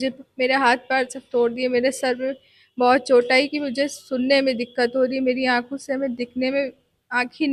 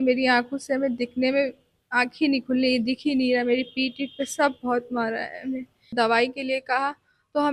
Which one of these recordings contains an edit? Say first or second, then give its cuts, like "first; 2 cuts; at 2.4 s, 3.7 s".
second; 1 cut; at 5.9 s